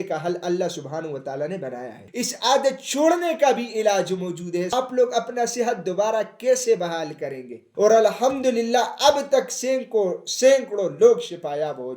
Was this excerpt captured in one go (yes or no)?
no